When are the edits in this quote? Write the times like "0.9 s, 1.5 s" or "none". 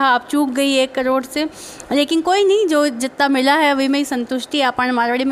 none